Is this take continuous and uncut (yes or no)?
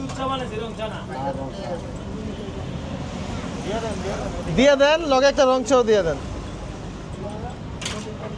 yes